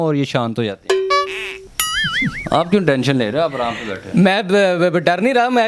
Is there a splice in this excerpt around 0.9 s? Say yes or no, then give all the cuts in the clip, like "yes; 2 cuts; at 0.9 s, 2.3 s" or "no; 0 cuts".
no; 0 cuts